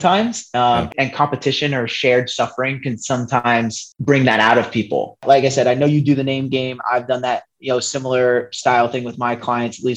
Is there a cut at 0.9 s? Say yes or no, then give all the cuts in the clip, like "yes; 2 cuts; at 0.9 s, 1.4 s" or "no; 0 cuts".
yes; 2 cuts; at 0.9 s, 5.2 s